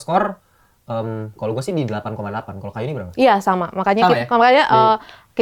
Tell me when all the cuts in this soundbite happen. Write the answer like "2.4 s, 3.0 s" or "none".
none

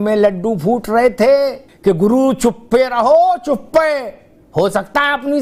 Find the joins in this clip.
1.7 s

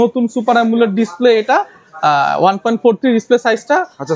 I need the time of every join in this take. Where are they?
none

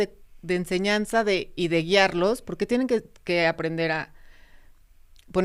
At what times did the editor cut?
none

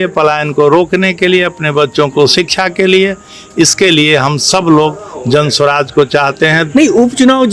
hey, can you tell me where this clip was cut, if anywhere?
6.6 s

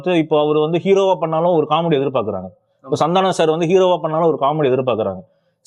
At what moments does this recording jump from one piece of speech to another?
none

